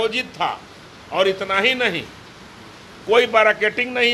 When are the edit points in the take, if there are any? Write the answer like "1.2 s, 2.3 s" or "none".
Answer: none